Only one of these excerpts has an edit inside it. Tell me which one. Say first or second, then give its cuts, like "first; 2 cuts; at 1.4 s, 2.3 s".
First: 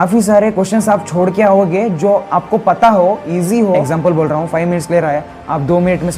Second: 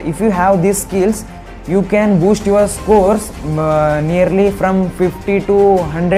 first; 1 cut; at 3.9 s